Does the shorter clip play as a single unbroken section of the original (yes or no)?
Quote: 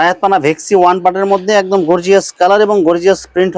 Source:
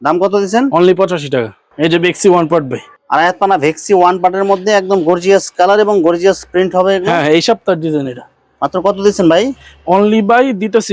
yes